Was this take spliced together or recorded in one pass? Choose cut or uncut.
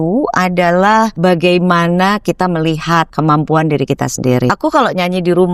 cut